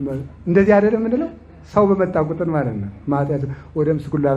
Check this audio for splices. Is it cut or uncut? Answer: uncut